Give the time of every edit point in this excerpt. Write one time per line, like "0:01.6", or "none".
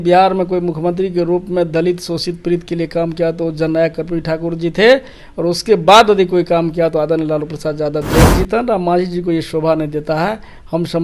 0:08.2